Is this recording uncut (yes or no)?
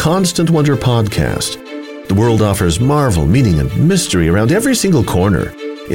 yes